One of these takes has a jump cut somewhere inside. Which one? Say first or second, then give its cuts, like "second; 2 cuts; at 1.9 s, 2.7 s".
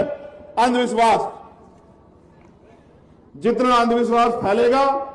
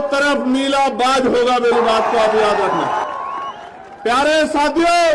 second; 1 cut; at 3.0 s